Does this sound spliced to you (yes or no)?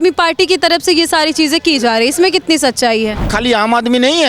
yes